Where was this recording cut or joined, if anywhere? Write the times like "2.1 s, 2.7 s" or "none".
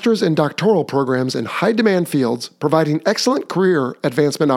none